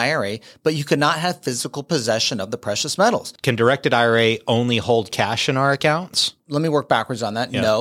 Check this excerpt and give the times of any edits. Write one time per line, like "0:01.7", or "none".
0:03.3
0:06.4